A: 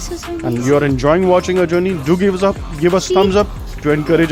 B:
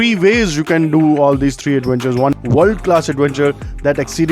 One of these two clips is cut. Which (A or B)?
B